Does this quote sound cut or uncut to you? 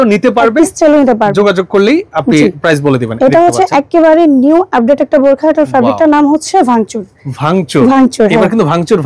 uncut